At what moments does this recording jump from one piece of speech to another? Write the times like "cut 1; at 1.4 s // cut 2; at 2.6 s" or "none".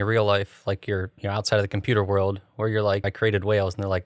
cut 1; at 3.1 s